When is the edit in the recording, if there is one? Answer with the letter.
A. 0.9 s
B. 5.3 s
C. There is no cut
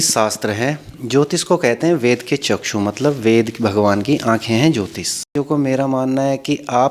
B